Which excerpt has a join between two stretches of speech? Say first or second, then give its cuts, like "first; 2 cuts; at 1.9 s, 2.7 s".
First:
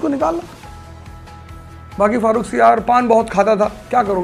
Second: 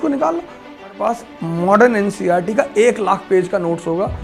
second; 1 cut; at 1.0 s